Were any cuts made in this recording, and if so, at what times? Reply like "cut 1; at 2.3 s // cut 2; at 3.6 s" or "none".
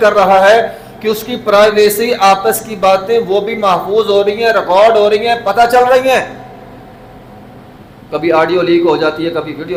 none

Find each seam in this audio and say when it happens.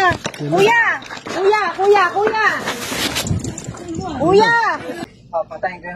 cut 1; at 5.0 s

